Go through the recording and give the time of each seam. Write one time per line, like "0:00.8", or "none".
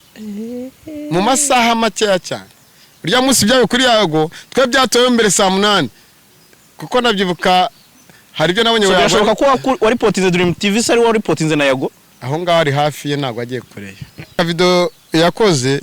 0:14.4